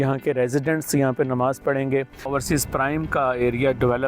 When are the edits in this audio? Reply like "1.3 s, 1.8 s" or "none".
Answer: 2.3 s